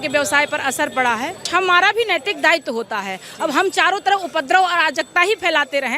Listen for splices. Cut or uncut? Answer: cut